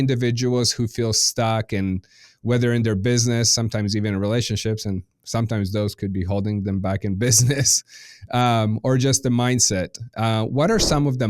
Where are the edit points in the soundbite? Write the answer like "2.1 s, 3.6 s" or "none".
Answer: none

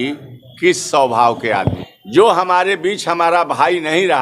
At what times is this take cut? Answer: 1.8 s

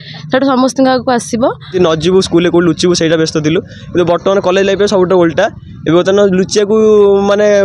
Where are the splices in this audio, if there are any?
1.7 s

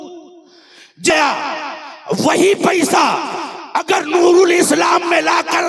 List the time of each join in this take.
1.1 s

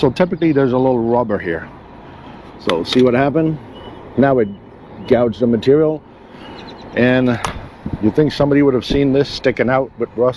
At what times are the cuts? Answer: none

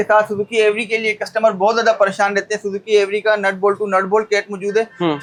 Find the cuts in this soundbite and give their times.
none

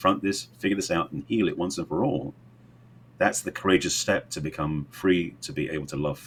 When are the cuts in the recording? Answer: none

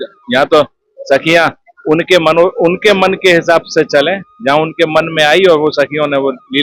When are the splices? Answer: none

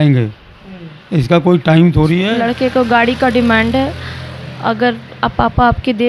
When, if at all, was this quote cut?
2.3 s

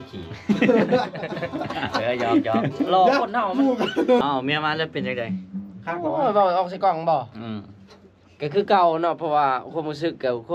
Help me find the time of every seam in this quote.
4.2 s

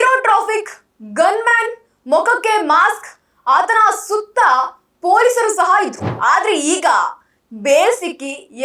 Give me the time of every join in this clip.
6.1 s

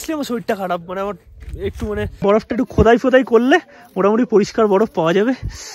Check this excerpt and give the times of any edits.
2.2 s

